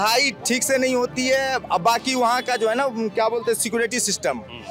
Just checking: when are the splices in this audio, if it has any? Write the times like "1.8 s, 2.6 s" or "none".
none

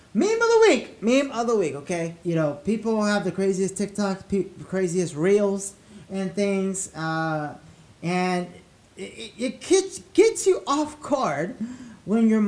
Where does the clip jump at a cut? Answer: 2.1 s

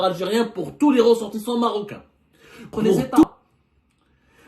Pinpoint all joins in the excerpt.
3.3 s

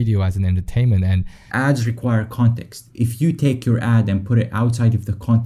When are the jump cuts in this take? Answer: 1.4 s, 2.9 s

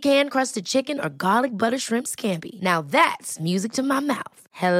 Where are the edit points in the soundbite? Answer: none

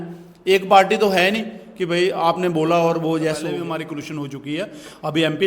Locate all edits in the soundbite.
3.6 s

